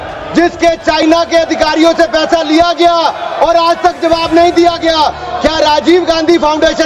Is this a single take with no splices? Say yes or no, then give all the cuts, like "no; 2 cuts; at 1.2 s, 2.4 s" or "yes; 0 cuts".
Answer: yes; 0 cuts